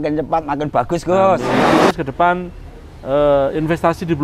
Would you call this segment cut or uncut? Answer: cut